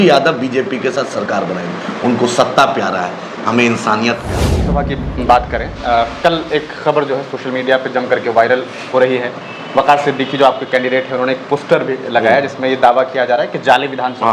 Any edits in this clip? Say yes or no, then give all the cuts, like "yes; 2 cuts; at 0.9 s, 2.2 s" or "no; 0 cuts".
yes; 1 cut; at 4.7 s